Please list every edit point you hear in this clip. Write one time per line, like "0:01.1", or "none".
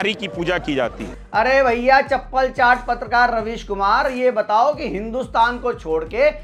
none